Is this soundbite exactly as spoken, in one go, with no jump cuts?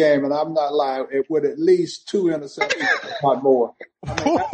yes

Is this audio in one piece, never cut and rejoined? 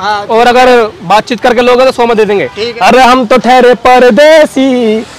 no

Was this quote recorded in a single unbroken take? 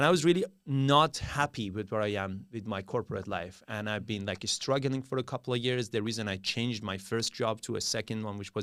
yes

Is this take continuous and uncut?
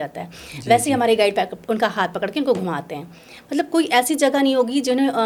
yes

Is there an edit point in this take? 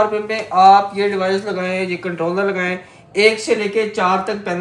no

